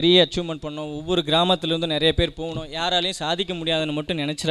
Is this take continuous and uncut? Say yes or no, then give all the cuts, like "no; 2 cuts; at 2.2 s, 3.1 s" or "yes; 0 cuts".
yes; 0 cuts